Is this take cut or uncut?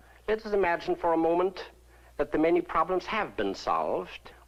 uncut